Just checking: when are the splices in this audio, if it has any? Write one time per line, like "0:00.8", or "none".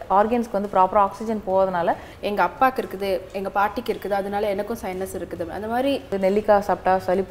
0:02.1
0:06.1